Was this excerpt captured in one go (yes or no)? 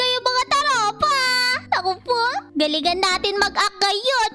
yes